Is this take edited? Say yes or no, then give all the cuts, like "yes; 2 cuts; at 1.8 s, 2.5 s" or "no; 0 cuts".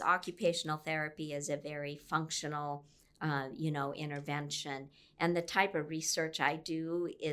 no; 0 cuts